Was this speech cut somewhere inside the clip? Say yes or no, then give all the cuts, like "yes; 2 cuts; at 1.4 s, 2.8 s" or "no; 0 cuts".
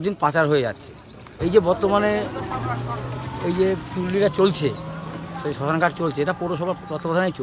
yes; 1 cut; at 1.2 s